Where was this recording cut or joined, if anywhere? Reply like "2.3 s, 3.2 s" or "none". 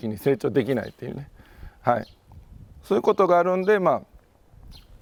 none